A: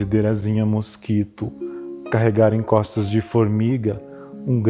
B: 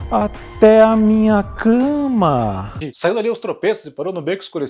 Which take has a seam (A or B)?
B